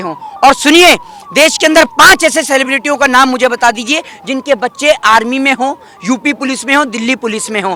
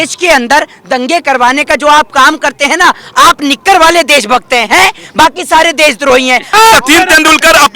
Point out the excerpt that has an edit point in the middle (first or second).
second